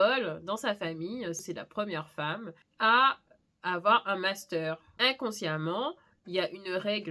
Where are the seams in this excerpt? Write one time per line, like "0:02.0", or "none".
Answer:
0:01.4
0:02.5
0:04.9